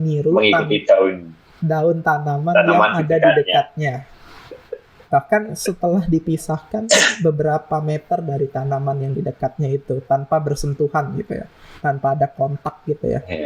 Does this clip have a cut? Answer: no; 0 cuts

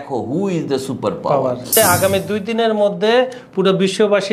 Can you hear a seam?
yes; 1 cut; at 1.7 s

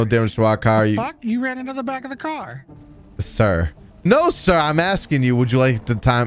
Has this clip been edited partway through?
yes; 1 cut; at 4.0 s

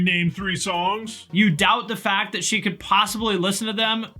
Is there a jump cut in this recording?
yes; 1 cut; at 1.2 s

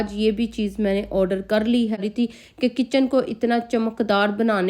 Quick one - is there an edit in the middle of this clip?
yes; 1 cut; at 2.0 s

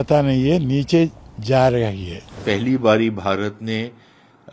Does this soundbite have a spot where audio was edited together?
yes; 1 cut; at 2.4 s

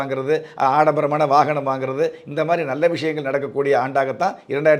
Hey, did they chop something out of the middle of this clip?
no; 0 cuts

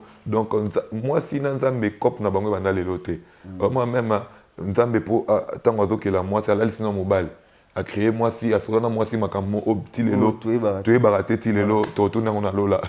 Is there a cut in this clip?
no; 0 cuts

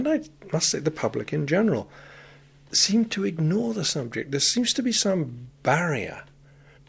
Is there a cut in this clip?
no; 0 cuts

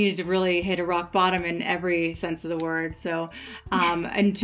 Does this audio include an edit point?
no; 0 cuts

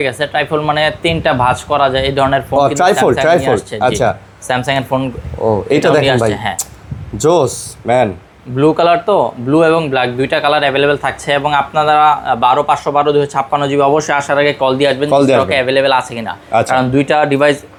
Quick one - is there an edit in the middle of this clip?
no; 0 cuts

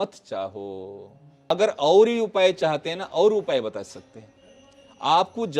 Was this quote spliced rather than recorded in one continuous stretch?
yes; 1 cut; at 1.5 s

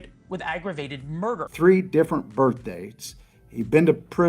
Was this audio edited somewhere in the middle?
yes; 1 cut; at 1.5 s

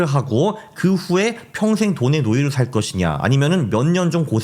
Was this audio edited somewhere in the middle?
no; 0 cuts

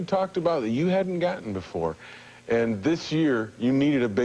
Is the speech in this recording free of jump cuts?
no; 1 cut; at 2.7 s

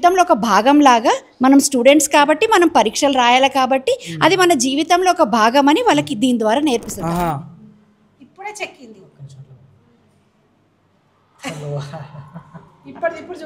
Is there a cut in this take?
yes; 1 cut; at 6.9 s

